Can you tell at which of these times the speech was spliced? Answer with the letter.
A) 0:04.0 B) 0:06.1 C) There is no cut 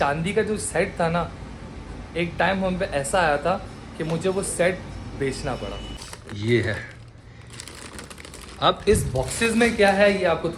B